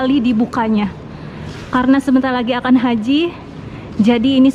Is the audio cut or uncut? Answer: uncut